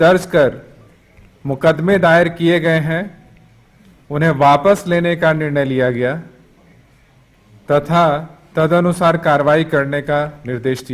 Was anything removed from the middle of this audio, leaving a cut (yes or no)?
no